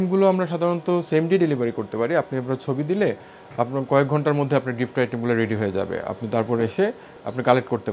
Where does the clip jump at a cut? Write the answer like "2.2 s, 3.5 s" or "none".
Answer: none